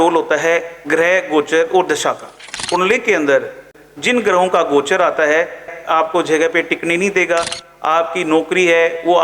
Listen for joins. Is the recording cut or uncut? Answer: cut